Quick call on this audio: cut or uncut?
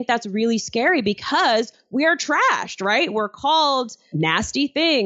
cut